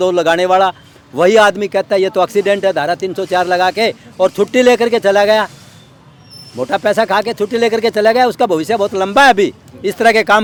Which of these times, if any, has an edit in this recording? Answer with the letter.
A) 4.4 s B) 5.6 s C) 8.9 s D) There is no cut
D